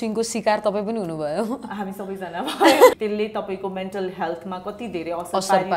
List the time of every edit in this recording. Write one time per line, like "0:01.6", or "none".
0:03.0

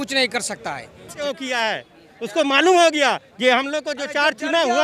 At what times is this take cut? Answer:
0:01.2

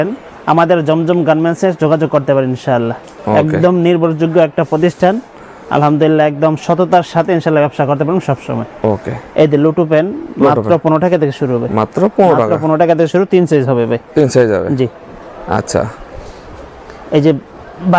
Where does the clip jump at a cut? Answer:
none

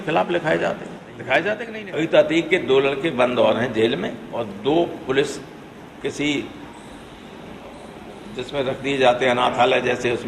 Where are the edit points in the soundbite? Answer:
0:01.7

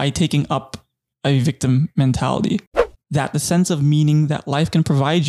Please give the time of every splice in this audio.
0:02.7

